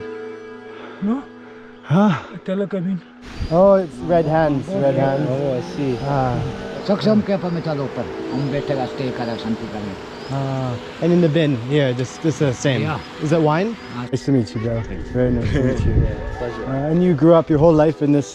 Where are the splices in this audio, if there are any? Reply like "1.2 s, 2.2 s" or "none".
3.1 s, 6.7 s, 14.1 s